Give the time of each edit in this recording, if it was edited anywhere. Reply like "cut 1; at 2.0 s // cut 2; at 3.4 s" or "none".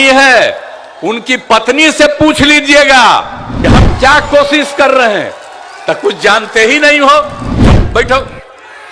cut 1; at 3.4 s // cut 2; at 7.8 s